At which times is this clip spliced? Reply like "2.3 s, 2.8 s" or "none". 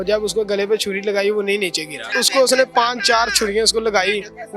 2.1 s